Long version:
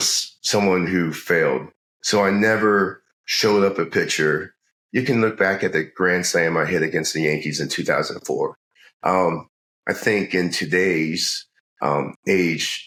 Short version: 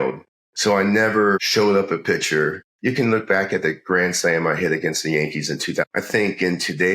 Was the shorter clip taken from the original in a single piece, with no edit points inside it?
no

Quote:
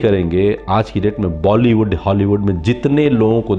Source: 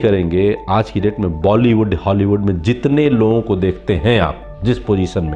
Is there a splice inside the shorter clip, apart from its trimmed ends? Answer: no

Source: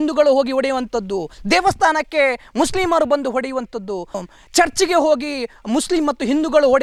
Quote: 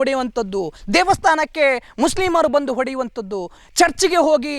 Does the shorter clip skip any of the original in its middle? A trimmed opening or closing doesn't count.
yes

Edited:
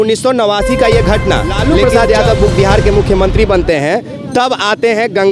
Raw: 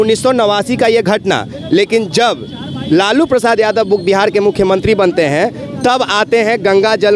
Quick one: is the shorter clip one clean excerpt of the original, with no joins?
no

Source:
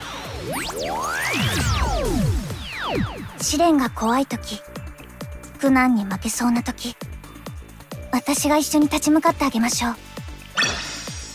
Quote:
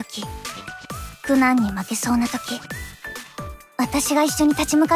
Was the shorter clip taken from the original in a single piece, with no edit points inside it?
yes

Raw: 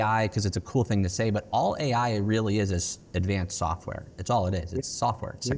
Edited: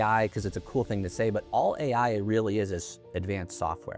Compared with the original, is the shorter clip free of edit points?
yes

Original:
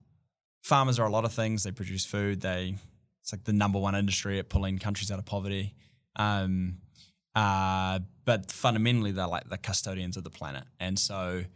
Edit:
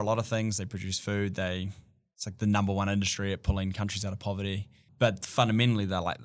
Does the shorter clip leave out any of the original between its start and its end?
yes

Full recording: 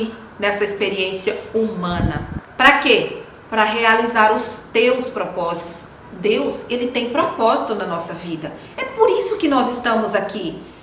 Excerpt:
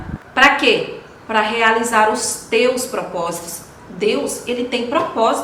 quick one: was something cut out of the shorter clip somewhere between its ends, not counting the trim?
no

